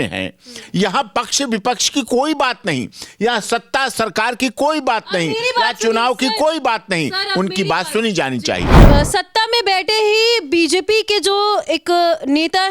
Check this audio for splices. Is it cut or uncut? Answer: cut